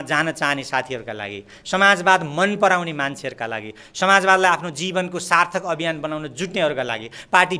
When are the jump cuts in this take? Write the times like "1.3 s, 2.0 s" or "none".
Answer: none